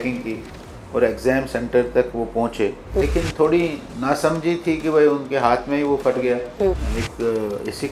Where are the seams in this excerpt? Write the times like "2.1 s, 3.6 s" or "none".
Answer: 3.0 s, 6.9 s